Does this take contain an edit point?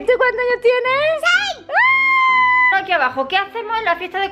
yes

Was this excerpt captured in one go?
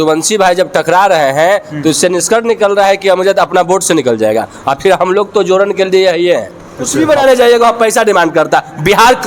no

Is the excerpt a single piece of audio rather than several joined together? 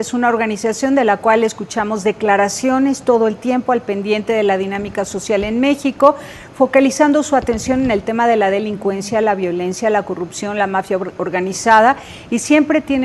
yes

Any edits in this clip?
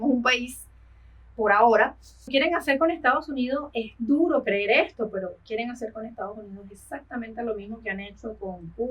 yes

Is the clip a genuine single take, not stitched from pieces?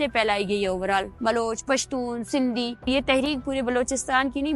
no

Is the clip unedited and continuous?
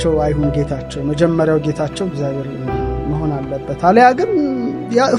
yes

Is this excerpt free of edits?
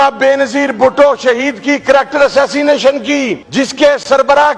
no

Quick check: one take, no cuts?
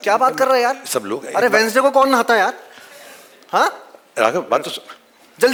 yes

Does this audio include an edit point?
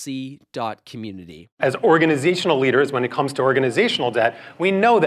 yes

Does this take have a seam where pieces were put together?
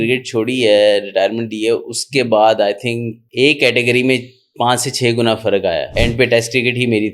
yes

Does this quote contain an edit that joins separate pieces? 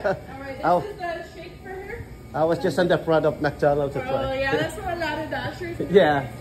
no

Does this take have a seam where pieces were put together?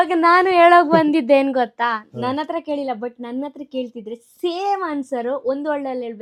no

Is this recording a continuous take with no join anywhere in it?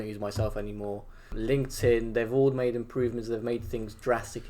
no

